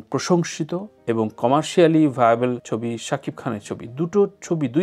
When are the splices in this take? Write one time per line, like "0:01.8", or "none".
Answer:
none